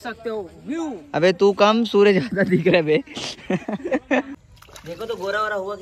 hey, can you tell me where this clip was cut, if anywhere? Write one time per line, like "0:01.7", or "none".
0:04.3